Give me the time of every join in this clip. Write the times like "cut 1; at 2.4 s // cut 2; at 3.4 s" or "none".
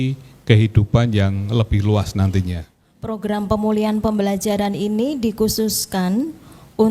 cut 1; at 3.2 s

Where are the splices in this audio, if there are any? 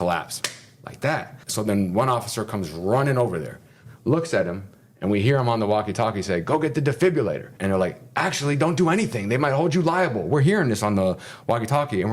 cut 1; at 1.4 s // cut 2; at 7.5 s

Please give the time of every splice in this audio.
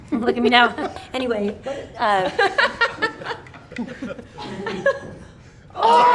cut 1; at 1.0 s

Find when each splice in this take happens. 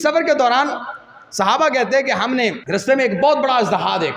cut 1; at 2.6 s

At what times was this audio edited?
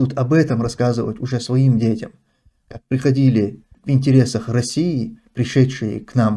cut 1; at 3.7 s

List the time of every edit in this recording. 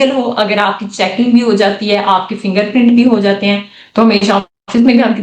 none

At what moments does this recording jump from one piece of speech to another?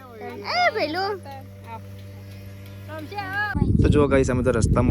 cut 1; at 3.5 s

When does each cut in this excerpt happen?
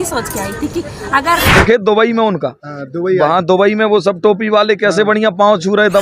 cut 1; at 1.5 s

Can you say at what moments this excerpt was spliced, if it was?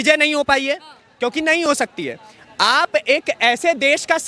none

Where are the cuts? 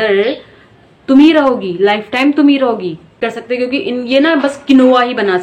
cut 1; at 3.2 s

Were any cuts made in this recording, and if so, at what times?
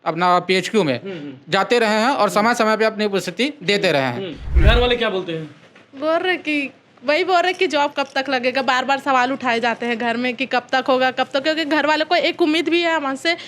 cut 1; at 4.5 s

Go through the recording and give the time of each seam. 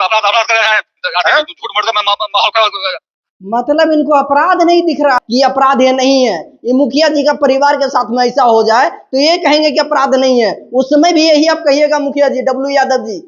cut 1; at 5.2 s

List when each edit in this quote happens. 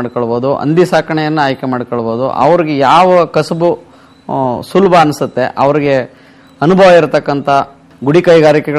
cut 1; at 7.9 s

